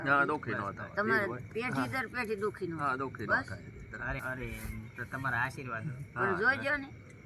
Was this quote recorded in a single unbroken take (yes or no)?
no